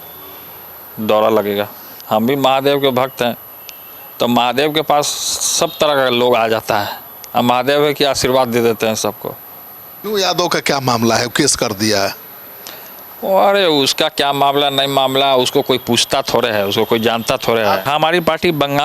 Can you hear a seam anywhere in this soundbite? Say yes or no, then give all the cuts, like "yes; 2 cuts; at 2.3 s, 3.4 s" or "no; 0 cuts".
yes; 3 cuts; at 1.9 s, 9.9 s, 17.8 s